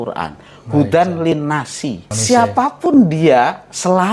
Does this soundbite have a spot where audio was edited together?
yes; 1 cut; at 2.1 s

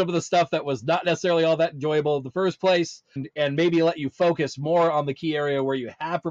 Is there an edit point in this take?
no; 0 cuts

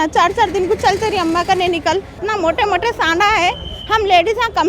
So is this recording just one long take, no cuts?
no; 1 cut; at 2.2 s

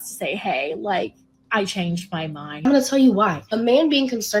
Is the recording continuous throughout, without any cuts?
no; 1 cut; at 2.7 s

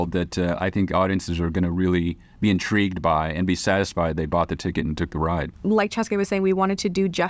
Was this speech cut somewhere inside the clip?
yes; 1 cut; at 5.5 s

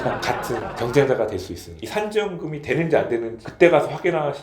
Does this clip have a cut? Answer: yes; 1 cut; at 1.7 s

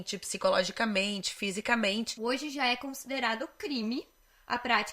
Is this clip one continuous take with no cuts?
no; 1 cut; at 2.1 s

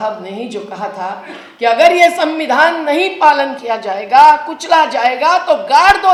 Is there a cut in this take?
no; 0 cuts

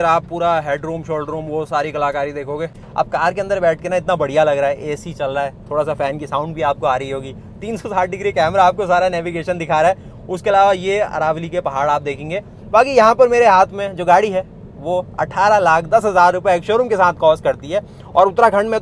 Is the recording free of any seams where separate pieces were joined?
no; 1 cut; at 2.8 s

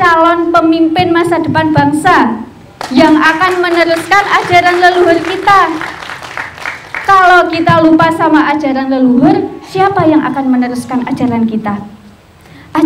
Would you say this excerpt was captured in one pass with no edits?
yes; 0 cuts

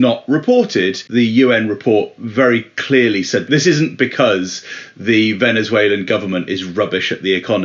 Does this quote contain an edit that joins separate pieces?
yes; 2 cuts; at 1.0 s, 3.5 s

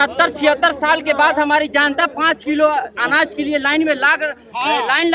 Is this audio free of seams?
yes; 0 cuts

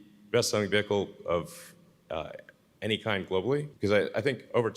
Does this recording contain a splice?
yes; 1 cut; at 3.7 s

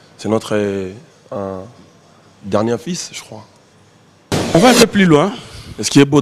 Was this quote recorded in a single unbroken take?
no; 1 cut; at 4.6 s

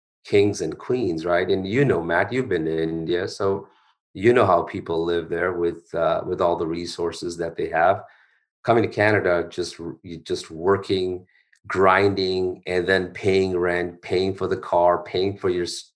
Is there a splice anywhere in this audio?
no; 0 cuts

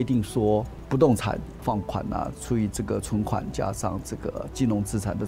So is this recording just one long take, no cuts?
yes; 0 cuts

